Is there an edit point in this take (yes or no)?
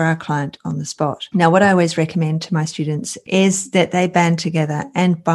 yes